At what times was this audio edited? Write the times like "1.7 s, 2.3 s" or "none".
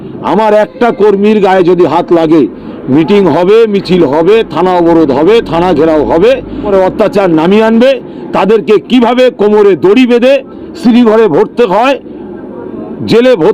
6.7 s